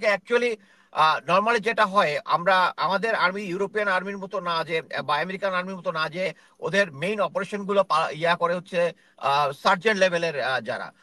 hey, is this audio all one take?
yes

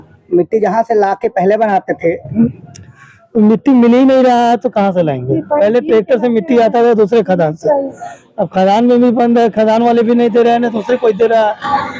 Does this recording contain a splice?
no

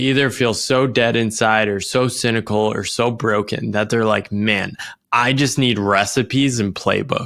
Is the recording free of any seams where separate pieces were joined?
yes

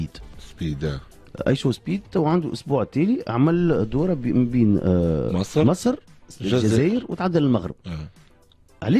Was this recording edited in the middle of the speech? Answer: no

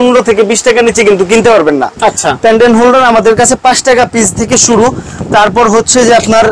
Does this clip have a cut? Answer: no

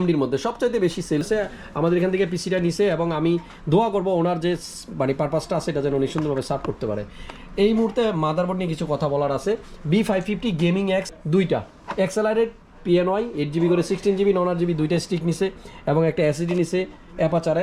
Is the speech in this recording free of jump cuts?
no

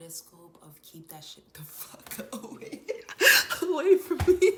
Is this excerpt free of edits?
yes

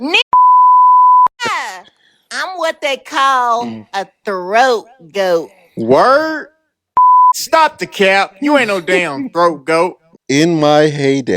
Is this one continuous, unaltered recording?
no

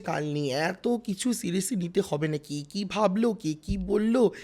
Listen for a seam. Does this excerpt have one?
no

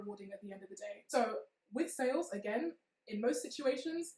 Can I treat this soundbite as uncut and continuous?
no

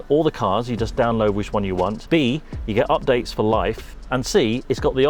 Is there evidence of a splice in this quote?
no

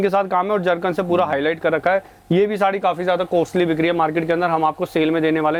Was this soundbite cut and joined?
no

